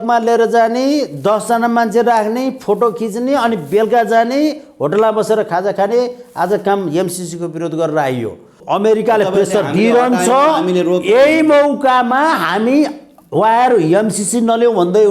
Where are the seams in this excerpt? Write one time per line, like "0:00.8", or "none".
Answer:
0:08.5